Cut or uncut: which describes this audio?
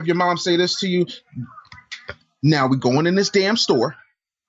uncut